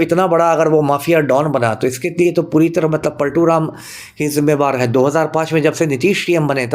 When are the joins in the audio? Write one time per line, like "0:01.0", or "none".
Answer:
none